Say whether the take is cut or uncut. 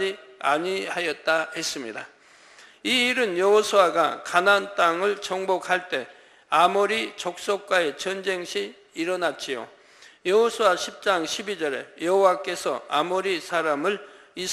uncut